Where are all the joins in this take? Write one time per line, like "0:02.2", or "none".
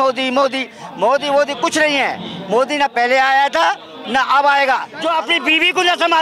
0:04.9